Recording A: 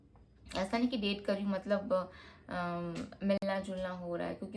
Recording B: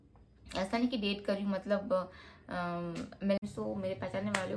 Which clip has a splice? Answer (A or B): B